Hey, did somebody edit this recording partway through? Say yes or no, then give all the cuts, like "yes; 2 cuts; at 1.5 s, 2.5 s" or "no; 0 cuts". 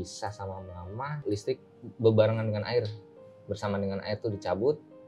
yes; 1 cut; at 1.2 s